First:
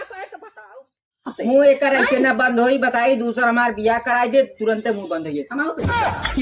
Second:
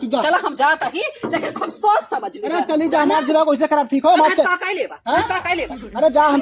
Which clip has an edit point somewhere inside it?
first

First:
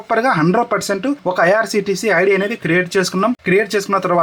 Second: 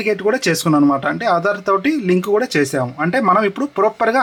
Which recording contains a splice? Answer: first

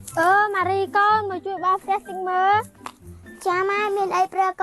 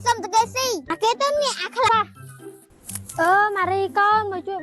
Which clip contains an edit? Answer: second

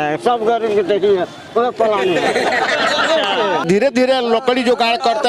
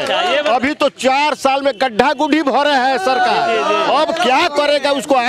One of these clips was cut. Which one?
first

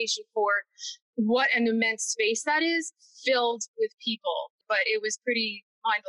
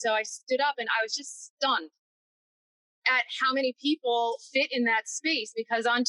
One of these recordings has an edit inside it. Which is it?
first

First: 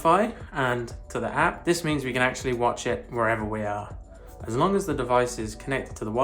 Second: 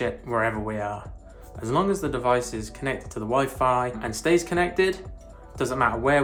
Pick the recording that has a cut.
first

